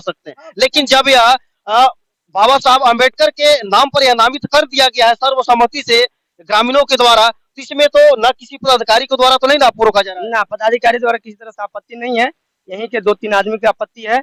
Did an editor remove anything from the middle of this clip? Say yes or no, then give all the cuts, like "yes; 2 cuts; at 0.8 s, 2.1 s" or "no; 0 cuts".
no; 0 cuts